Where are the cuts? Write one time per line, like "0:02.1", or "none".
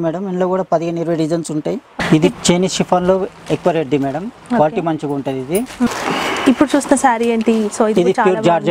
0:01.9
0:05.9